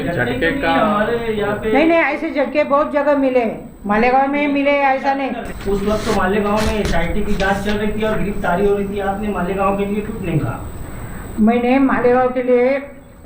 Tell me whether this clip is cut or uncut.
cut